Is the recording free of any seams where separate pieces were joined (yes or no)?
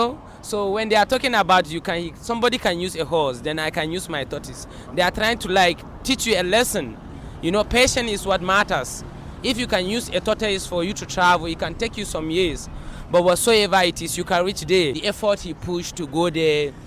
no